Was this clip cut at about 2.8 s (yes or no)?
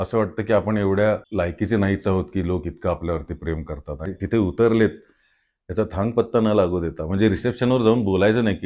no